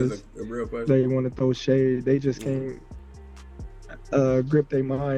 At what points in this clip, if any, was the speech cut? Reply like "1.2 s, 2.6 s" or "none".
none

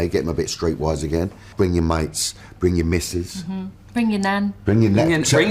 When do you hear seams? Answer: 1.5 s

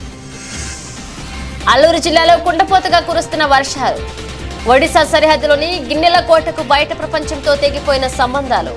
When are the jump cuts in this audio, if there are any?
1.1 s

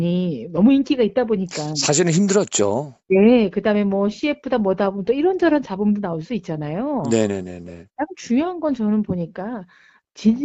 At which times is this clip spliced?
none

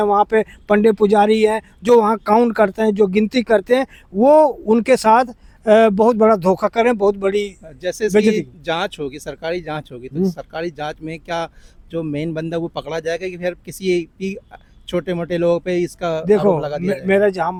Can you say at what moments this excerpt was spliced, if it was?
none

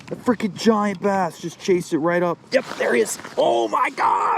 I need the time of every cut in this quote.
2.4 s

